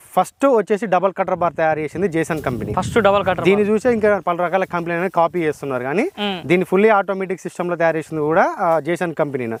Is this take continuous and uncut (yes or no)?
yes